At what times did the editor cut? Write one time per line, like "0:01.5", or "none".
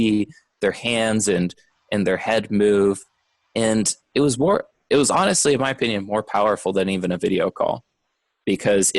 none